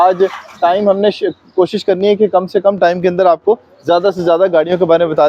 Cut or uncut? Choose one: uncut